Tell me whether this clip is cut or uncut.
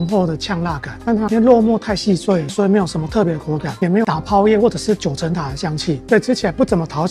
uncut